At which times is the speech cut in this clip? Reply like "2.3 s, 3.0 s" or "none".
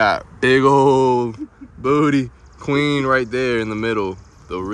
none